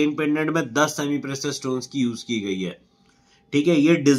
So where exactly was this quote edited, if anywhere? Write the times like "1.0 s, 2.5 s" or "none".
none